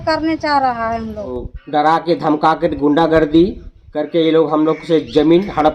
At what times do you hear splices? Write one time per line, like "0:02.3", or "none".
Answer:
0:01.4